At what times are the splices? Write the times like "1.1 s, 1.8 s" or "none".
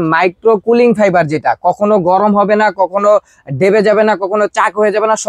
none